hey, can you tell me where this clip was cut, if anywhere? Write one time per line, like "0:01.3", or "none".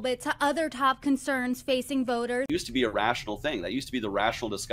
none